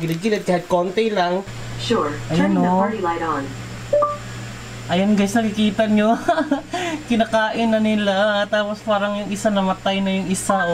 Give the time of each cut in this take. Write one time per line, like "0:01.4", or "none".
0:01.4